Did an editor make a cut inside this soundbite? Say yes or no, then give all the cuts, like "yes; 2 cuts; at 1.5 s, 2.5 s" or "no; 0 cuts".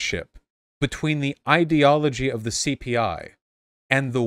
no; 0 cuts